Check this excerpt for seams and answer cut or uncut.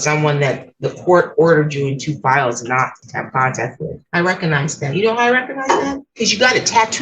cut